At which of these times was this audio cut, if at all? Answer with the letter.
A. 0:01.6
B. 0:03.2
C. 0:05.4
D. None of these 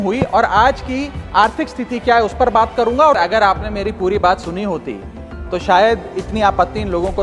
B